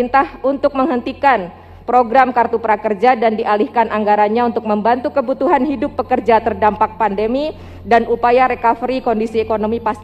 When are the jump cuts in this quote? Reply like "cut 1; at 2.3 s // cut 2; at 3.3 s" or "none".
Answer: none